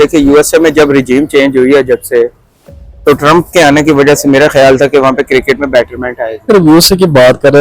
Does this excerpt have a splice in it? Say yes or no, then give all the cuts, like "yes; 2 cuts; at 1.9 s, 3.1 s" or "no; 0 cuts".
yes; 1 cut; at 6.5 s